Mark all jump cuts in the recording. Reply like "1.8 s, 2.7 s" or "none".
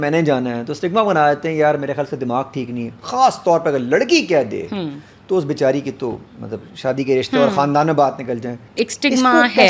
8.6 s